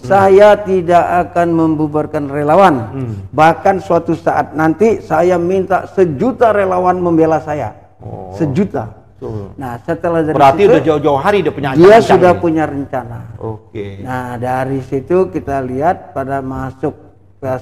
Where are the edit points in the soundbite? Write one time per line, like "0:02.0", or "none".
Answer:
none